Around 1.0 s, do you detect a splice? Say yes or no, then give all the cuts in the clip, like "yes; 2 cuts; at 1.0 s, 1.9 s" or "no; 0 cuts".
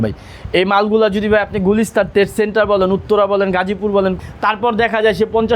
no; 1 cut; at 4.2 s